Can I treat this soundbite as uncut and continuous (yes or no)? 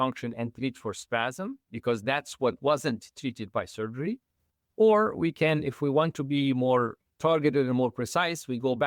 yes